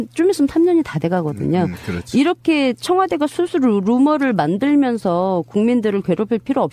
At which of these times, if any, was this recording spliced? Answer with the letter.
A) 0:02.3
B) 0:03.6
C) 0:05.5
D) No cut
B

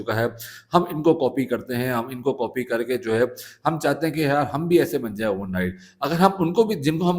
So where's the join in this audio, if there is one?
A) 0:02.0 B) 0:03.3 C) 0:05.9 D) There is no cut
D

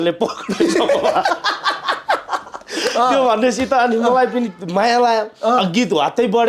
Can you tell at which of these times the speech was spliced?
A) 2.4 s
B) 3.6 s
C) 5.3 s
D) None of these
D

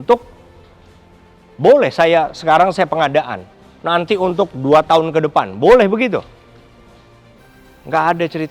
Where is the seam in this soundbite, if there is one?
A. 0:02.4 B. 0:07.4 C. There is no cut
B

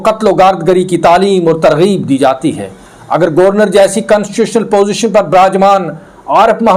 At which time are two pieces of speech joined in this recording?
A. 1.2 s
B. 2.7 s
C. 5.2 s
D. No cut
D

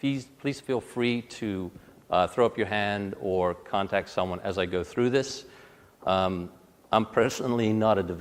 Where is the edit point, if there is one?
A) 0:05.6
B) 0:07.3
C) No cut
C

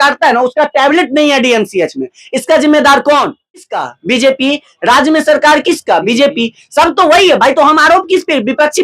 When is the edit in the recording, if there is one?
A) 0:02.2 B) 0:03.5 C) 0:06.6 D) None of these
B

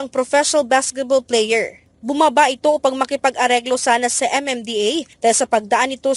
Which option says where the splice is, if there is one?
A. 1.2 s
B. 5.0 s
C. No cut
C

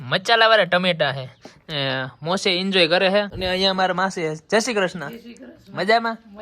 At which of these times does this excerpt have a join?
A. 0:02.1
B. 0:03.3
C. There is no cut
B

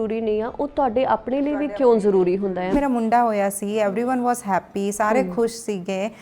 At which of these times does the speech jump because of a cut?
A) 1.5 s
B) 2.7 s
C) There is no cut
B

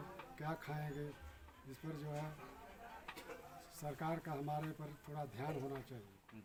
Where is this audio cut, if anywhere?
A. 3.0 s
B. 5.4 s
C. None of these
C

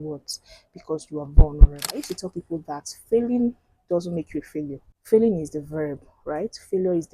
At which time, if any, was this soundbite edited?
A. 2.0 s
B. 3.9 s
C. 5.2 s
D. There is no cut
A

